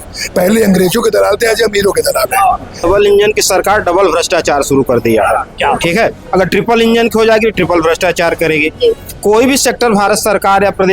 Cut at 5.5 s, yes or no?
no